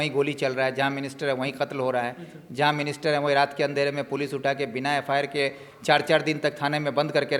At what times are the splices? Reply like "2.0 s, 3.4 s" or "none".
none